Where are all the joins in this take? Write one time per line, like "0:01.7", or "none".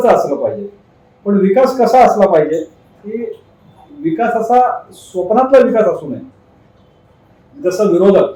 none